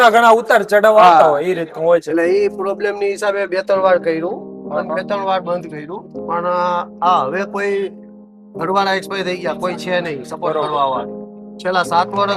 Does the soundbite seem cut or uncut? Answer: uncut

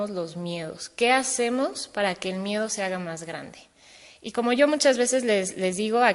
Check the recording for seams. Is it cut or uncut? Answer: cut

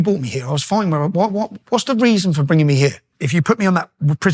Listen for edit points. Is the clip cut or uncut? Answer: cut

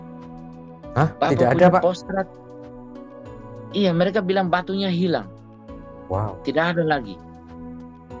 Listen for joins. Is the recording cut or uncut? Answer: uncut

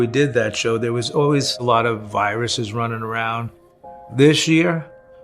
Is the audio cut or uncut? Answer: uncut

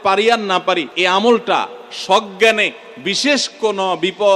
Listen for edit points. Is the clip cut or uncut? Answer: cut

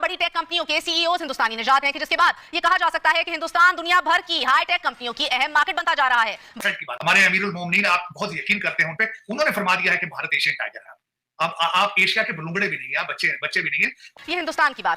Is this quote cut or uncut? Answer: cut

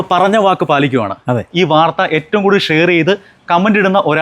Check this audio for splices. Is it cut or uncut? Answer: cut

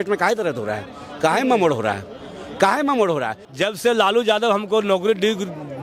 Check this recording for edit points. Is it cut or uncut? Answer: cut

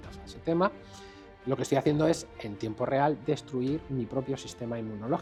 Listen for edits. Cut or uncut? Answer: uncut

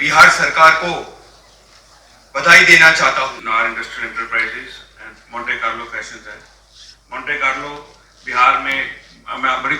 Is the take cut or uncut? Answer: cut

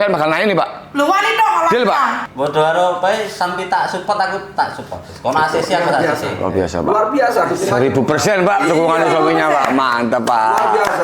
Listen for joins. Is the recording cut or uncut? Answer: cut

